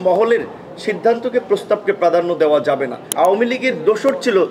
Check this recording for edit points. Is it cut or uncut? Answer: cut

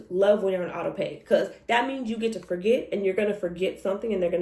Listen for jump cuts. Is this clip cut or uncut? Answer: uncut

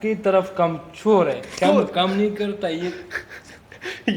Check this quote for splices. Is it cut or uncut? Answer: uncut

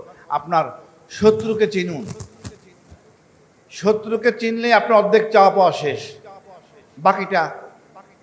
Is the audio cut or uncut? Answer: uncut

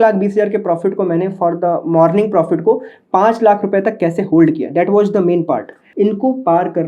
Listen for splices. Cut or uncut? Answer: cut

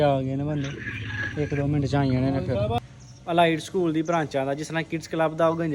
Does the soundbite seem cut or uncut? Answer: cut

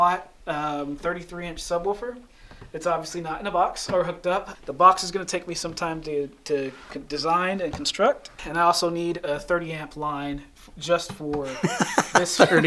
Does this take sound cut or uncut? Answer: cut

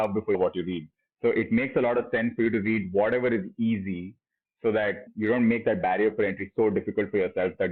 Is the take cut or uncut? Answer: uncut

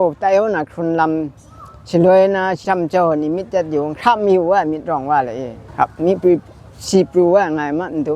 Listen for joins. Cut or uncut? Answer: cut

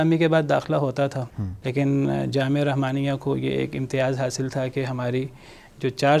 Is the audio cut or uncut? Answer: uncut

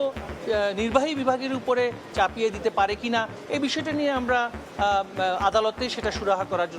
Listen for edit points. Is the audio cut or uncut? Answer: uncut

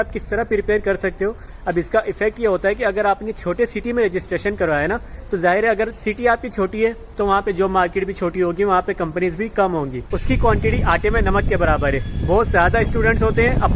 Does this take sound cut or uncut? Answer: cut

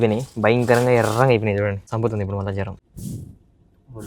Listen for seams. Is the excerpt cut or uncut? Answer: cut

